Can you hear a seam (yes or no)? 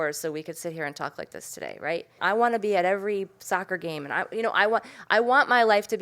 yes